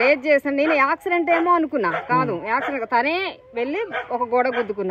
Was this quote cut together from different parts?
no; 0 cuts

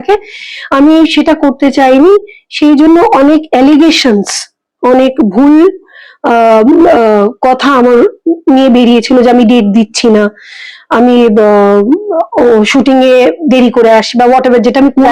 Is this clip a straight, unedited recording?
yes; 0 cuts

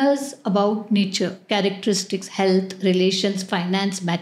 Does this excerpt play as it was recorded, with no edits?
yes; 0 cuts

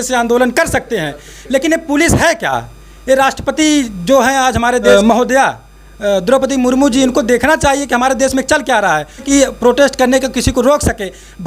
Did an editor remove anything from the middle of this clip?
yes; 2 cuts; at 4.9 s, 9.2 s

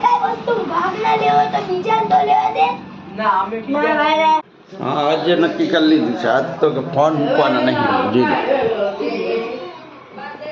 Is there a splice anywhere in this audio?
yes; 1 cut; at 4.5 s

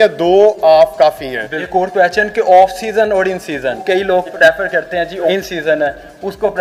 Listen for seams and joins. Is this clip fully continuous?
yes; 0 cuts

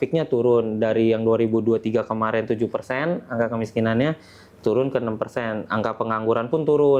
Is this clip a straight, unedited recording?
yes; 0 cuts

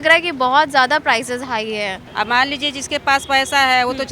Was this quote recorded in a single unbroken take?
no; 1 cut; at 2.0 s

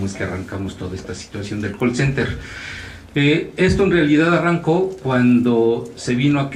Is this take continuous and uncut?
yes; 0 cuts

